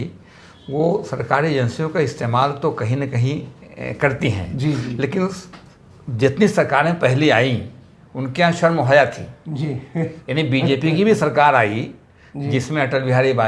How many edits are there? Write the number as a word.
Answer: zero